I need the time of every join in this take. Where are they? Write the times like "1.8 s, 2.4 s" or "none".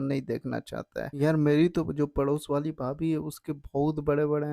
1.1 s